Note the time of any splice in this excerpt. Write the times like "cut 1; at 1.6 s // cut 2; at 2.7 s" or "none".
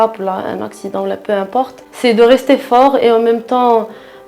cut 1; at 1.8 s

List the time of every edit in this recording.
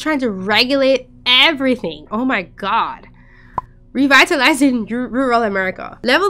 none

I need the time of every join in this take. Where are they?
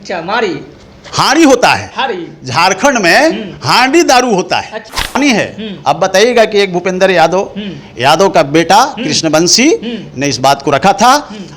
cut 1; at 5.2 s

